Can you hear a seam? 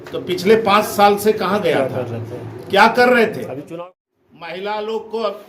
yes; 1 cut; at 3.8 s

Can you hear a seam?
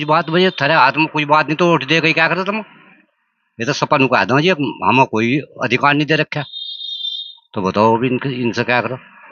no; 0 cuts

